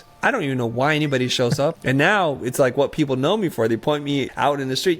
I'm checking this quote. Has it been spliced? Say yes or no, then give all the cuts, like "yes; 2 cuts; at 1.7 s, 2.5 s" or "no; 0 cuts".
yes; 1 cut; at 1.8 s